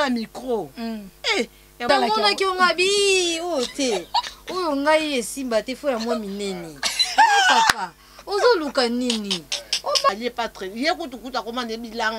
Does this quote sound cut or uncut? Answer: cut